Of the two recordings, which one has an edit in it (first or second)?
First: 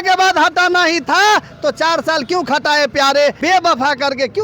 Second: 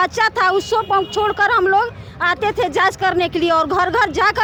first